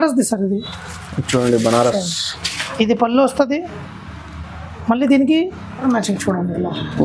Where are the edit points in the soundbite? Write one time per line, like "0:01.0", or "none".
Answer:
0:05.8